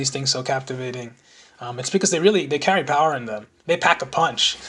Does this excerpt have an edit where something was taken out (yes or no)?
yes